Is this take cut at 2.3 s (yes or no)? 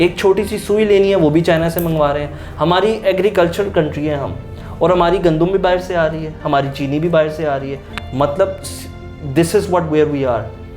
no